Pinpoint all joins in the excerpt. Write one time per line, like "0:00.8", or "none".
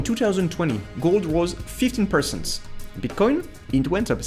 none